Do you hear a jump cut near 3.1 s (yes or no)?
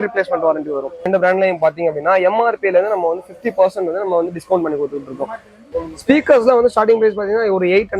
no